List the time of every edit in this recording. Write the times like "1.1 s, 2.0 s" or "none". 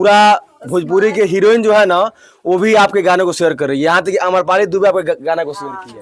none